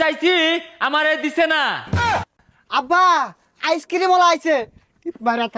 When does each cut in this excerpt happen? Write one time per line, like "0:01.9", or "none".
0:02.0